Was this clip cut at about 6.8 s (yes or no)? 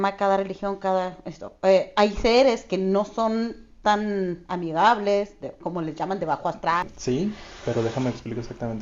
yes